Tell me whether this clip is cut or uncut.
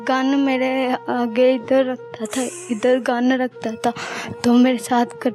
uncut